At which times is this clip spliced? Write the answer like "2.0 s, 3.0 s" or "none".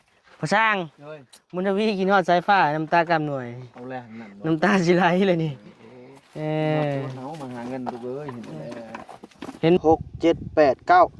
9.8 s